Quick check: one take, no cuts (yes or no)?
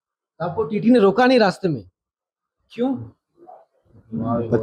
yes